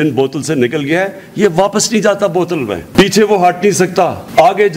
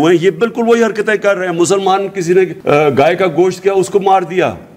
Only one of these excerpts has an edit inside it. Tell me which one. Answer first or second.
second